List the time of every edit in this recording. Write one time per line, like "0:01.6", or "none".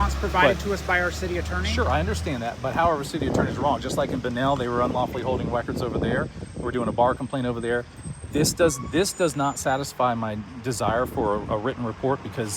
none